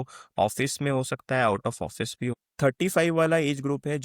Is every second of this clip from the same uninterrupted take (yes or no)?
no